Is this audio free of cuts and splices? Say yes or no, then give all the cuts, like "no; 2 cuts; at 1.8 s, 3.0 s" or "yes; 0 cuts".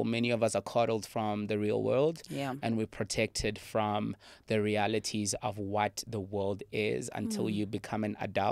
yes; 0 cuts